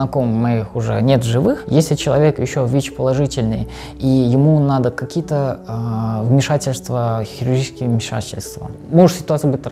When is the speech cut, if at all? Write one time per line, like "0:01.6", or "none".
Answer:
0:01.6